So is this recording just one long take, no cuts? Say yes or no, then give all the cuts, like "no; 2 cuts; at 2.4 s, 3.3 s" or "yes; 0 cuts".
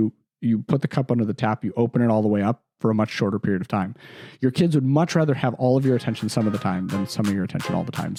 yes; 0 cuts